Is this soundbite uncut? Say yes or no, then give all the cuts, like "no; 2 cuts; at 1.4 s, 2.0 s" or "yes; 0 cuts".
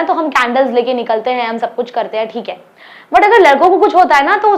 yes; 0 cuts